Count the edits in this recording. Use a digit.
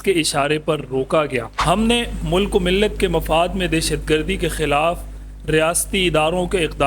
1